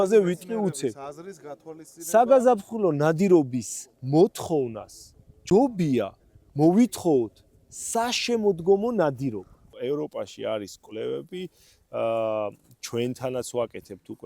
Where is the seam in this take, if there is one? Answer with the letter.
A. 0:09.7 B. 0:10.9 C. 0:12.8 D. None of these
A